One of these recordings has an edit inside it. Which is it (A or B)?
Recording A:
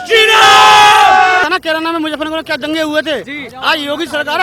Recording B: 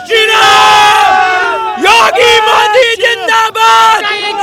A